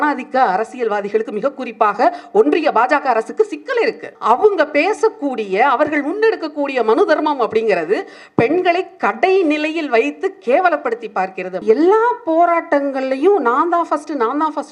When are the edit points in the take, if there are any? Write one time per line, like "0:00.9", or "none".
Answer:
0:04.1
0:11.6